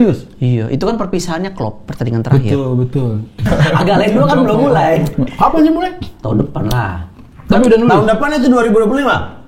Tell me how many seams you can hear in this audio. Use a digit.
1